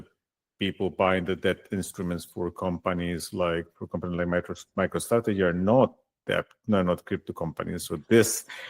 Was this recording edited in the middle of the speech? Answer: no; 0 cuts

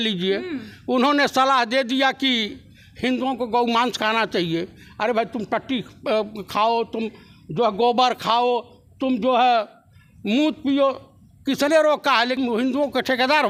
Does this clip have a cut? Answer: no; 0 cuts

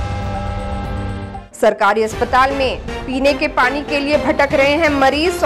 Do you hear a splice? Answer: yes; 1 cut; at 1.4 s

